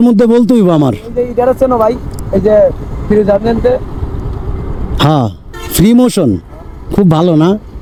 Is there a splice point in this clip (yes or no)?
no